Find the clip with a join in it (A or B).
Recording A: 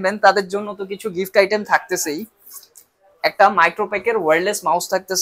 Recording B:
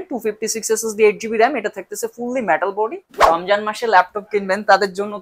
B